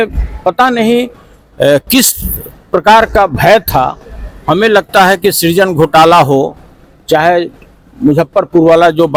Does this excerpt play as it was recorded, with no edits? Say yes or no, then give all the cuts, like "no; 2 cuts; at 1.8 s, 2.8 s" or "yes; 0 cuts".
yes; 0 cuts